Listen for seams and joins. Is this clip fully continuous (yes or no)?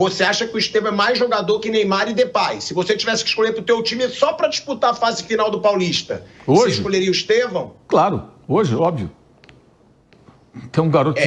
yes